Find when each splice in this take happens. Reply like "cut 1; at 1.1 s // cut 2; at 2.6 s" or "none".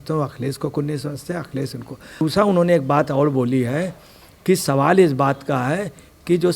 cut 1; at 2.2 s